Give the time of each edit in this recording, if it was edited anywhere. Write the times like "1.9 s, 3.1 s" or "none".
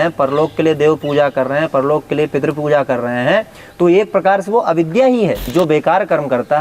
5.5 s